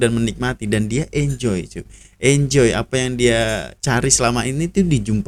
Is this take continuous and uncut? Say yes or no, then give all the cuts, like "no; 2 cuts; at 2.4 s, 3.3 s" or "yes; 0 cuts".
yes; 0 cuts